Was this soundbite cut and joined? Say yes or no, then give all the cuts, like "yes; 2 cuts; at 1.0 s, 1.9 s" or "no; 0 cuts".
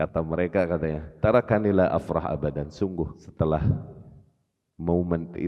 yes; 2 cuts; at 1.1 s, 3.2 s